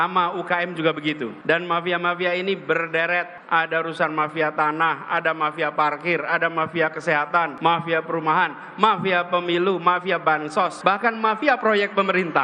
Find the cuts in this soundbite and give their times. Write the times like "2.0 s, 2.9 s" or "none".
1.5 s, 3.4 s, 7.5 s, 10.4 s